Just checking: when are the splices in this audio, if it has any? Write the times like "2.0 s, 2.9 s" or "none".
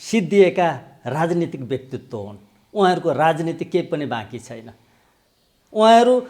none